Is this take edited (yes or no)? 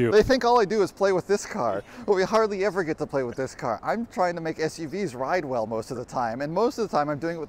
no